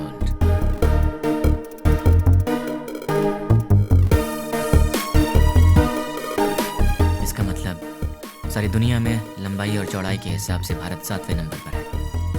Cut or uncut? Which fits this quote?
uncut